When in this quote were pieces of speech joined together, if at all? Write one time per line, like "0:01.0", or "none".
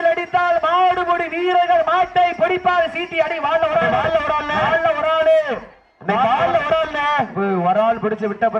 none